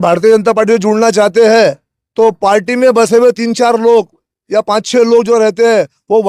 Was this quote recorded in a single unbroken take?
yes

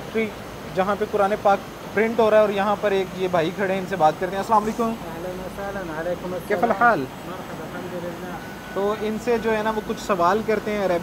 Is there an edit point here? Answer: no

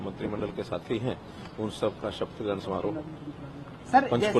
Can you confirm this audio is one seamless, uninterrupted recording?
yes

